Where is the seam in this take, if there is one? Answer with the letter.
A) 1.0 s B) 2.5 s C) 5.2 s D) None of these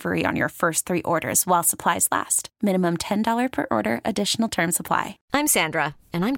C